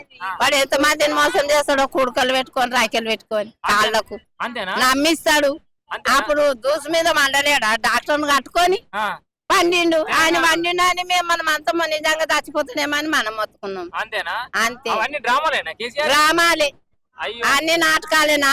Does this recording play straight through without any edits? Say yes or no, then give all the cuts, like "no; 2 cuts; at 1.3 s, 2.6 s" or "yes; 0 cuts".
yes; 0 cuts